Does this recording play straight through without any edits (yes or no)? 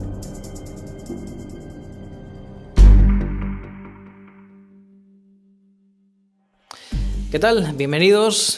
yes